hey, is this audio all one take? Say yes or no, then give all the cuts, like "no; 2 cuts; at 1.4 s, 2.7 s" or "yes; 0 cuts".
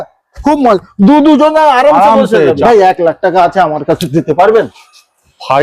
no; 1 cut; at 2.6 s